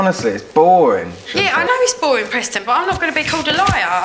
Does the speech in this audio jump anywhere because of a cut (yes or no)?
yes